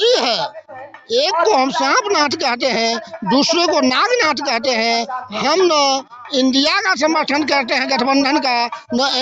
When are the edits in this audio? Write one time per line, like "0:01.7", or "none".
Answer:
none